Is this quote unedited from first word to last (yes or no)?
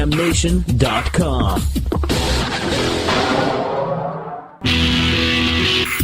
no